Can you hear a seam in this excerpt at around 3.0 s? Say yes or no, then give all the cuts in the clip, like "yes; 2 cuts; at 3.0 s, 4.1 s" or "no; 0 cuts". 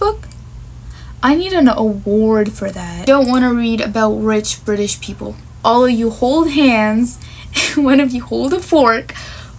yes; 2 cuts; at 3.0 s, 5.4 s